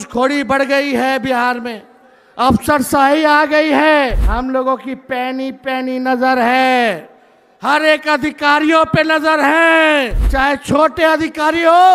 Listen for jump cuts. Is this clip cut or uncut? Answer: cut